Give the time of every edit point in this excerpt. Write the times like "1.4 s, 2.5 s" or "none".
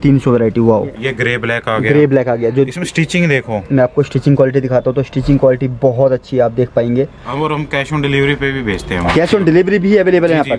1.1 s, 7.3 s

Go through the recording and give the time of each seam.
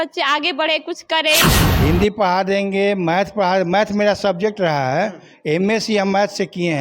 1.6 s

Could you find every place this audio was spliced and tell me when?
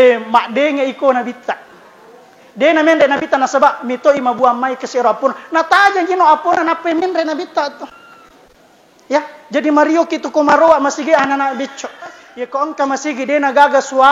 12.2 s

